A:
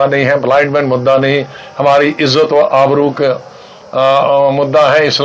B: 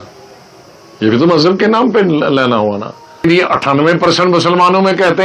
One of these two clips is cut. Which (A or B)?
B